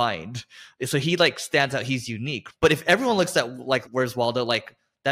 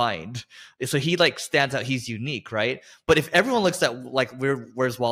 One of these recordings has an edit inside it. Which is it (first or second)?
first